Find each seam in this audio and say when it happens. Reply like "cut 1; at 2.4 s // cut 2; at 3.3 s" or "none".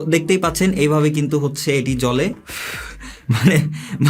cut 1; at 2.4 s